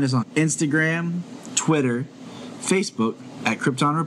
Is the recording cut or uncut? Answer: uncut